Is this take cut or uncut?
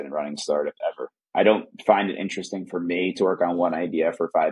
cut